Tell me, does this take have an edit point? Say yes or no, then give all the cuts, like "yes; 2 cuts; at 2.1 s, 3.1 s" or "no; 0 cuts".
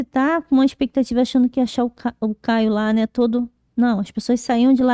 no; 0 cuts